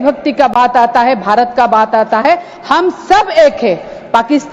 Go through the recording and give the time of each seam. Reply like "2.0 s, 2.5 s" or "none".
none